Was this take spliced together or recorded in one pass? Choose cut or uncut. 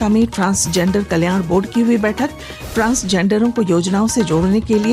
uncut